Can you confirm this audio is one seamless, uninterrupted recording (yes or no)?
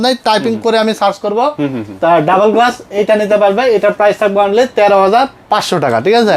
yes